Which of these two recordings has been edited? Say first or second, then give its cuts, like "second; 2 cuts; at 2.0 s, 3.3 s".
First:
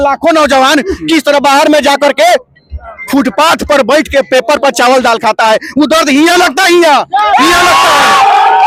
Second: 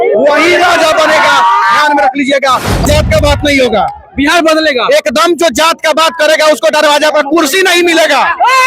second; 1 cut; at 2.8 s